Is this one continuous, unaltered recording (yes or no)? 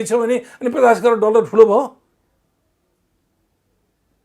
yes